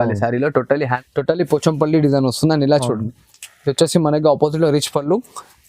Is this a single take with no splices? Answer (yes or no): no